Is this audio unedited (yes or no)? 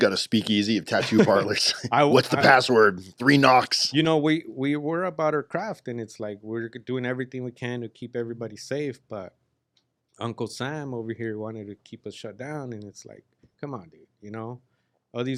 yes